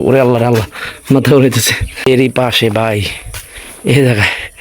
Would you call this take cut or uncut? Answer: cut